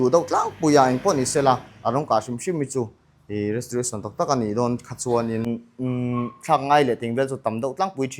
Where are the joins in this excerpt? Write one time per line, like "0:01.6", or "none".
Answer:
0:05.5